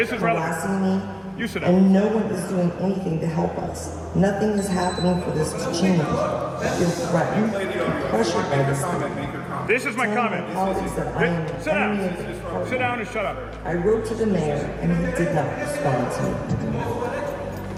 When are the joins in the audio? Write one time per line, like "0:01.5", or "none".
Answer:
none